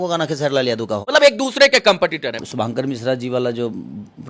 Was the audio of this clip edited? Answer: yes; 2 cuts; at 1.0 s, 2.4 s

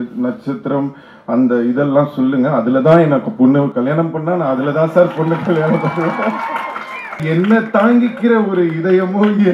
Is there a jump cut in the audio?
yes; 1 cut; at 7.2 s

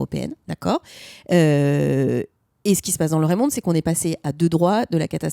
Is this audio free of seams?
yes; 0 cuts

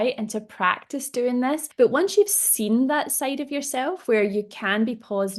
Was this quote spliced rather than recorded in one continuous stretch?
yes; 1 cut; at 1.7 s

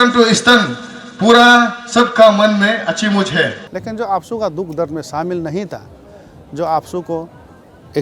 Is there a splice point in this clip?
yes; 1 cut; at 3.7 s

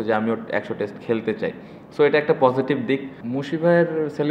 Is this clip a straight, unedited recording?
no; 1 cut; at 3.2 s

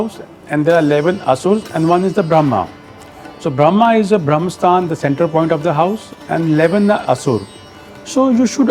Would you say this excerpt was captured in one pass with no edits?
yes; 0 cuts

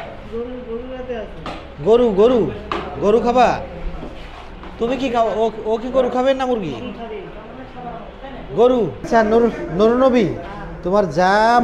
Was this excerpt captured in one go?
no; 1 cut; at 9.1 s

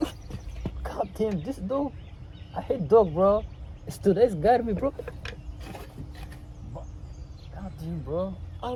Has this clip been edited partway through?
no; 0 cuts

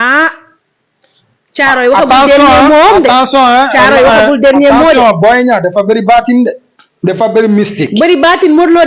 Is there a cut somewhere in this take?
no; 0 cuts

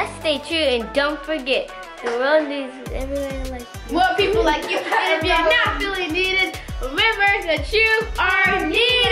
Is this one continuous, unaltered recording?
yes; 0 cuts

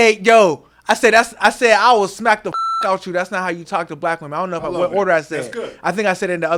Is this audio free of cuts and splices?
yes; 0 cuts

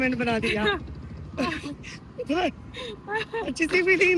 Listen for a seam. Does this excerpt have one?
no; 0 cuts

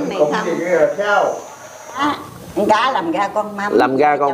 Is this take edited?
yes; 1 cut; at 2.0 s

